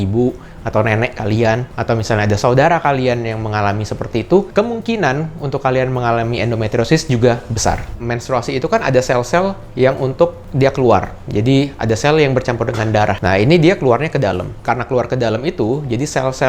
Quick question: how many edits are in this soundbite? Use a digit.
0